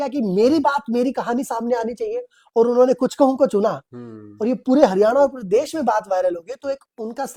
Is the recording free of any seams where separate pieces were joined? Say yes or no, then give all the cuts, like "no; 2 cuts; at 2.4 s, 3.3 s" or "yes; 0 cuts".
yes; 0 cuts